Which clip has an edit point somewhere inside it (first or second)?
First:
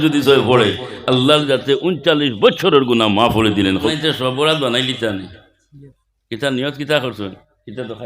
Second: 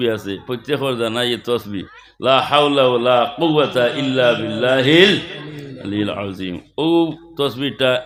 first